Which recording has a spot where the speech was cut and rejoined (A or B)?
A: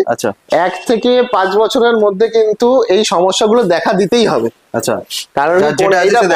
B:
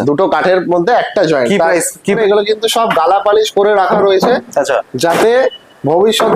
B